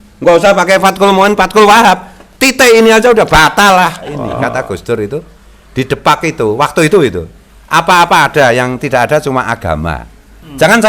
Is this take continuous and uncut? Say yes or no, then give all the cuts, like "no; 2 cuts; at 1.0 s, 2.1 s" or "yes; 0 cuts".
no; 1 cut; at 4.4 s